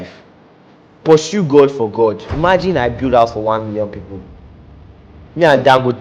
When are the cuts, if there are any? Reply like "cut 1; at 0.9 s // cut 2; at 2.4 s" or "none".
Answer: cut 1; at 2.3 s